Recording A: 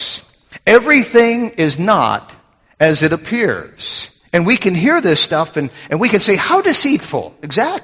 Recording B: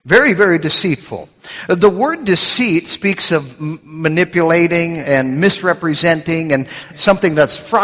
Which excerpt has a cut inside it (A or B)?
B